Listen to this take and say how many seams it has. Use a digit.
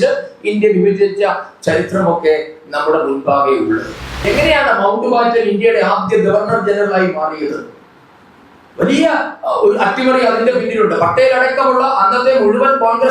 1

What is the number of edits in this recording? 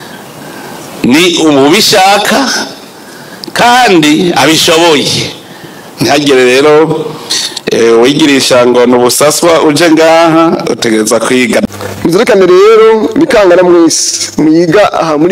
1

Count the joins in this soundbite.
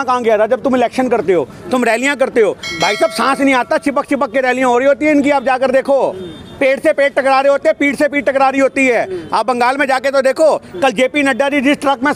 0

